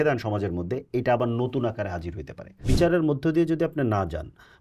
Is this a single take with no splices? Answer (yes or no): no